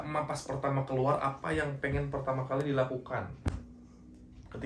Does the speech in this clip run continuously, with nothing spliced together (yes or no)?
yes